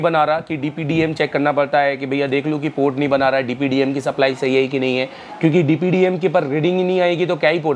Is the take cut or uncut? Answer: uncut